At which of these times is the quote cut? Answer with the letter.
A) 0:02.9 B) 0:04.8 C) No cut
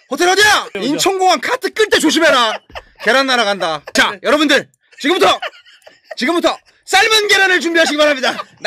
C